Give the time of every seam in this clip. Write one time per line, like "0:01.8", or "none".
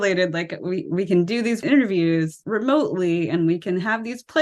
0:01.6
0:02.4